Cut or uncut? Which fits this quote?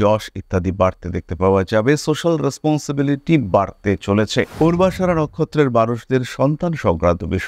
cut